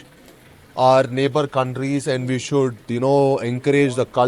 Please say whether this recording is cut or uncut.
uncut